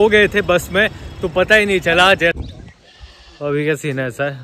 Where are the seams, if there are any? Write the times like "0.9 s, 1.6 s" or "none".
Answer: 2.4 s